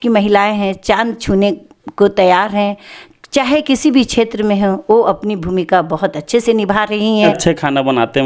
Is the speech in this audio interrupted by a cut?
yes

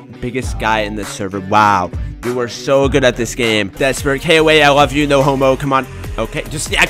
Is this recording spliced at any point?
yes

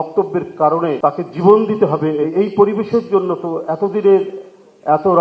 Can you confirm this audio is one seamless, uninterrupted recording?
no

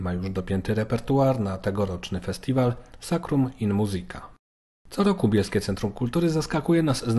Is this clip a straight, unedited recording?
yes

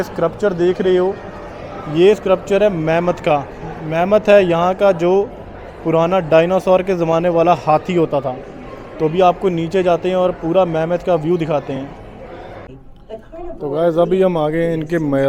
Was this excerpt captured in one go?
yes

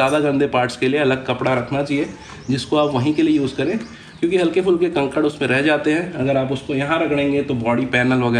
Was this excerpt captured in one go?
yes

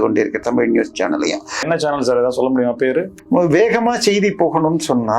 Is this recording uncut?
no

